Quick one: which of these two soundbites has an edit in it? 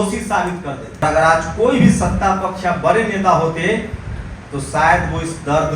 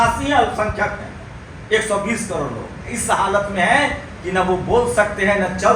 first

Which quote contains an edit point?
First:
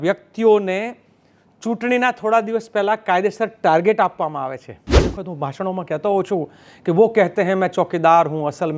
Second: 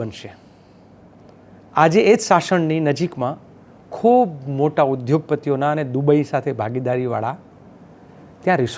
first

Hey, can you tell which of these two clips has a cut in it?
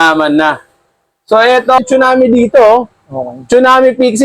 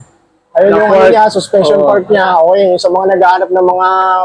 first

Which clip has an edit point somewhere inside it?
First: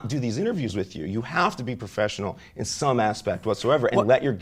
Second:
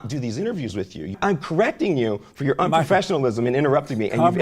second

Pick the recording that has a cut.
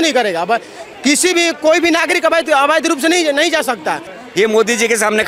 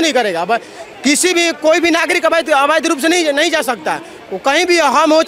first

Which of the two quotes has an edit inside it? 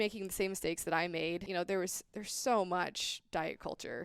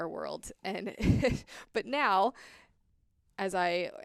first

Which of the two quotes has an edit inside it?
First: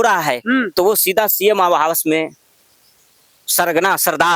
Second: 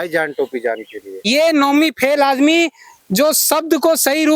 second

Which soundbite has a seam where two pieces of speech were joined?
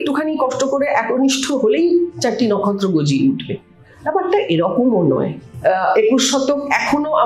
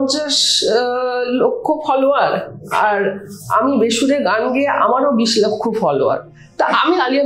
first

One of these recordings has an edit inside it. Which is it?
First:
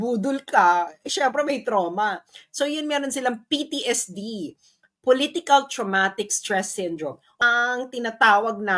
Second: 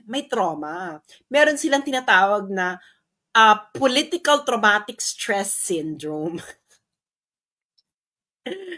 first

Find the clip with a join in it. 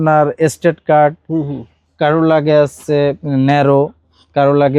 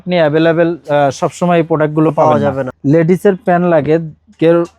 second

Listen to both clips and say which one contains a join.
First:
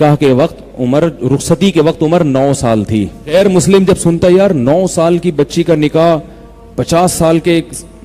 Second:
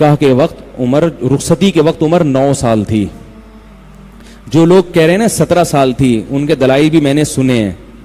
first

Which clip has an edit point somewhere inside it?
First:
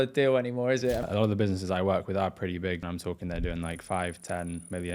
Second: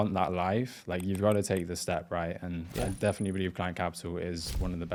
first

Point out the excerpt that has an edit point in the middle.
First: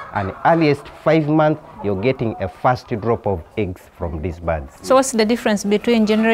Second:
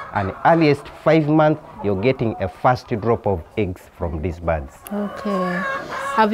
first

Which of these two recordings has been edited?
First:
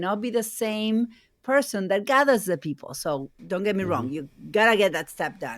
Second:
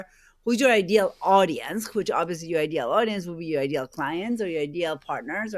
first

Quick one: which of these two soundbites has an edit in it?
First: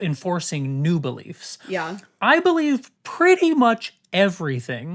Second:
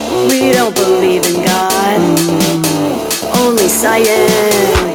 first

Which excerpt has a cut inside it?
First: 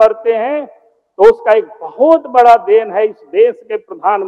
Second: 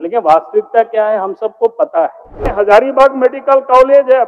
second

